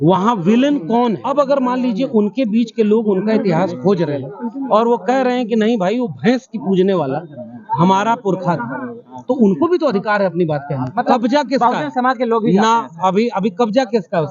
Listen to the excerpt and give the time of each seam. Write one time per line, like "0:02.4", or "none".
0:01.2
0:10.9